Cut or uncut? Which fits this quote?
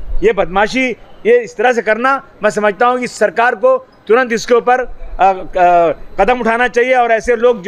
uncut